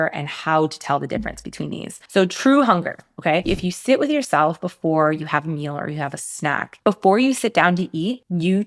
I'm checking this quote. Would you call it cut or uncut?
cut